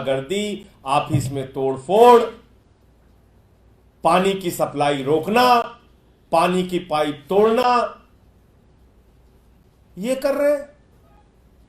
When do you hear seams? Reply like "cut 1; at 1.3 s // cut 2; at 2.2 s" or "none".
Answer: none

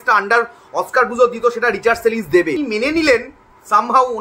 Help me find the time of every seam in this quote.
cut 1; at 2.6 s

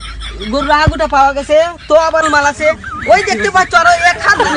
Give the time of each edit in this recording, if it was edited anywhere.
cut 1; at 2.2 s

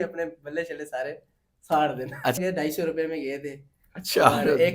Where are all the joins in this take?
cut 1; at 2.4 s

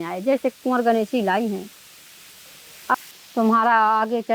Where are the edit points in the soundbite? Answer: cut 1; at 2.9 s

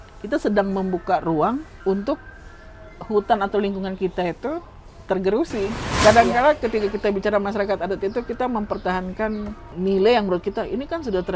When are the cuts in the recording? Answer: cut 1; at 1.7 s // cut 2; at 5.9 s // cut 3; at 9.6 s

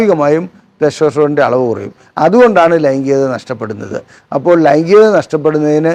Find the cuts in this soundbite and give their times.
none

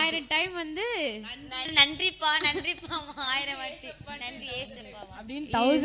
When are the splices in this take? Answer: cut 1; at 1.7 s

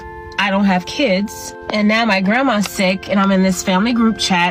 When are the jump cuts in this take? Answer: none

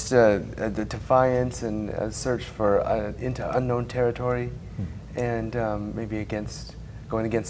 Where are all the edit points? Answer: none

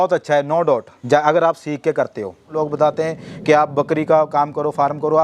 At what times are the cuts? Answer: cut 1; at 0.9 s // cut 2; at 2.5 s

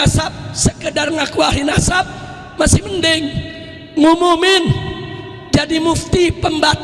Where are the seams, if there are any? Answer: none

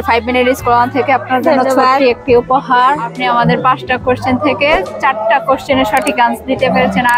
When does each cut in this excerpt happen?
cut 1; at 3.1 s

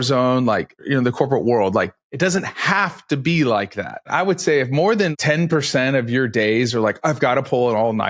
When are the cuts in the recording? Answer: cut 1; at 0.8 s // cut 2; at 2.0 s // cut 3; at 4.1 s // cut 4; at 5.1 s

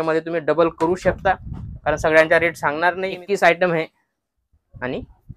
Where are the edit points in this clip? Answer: cut 1; at 3.1 s

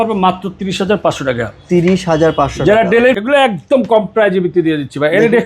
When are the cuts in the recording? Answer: cut 1; at 3.1 s

